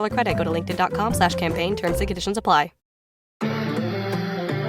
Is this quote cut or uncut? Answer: cut